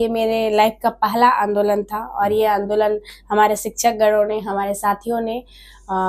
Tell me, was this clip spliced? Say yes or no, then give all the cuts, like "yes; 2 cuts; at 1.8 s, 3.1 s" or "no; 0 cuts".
no; 0 cuts